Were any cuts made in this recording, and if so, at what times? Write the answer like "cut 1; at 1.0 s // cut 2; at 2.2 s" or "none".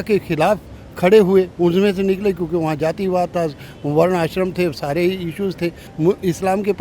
cut 1; at 5.9 s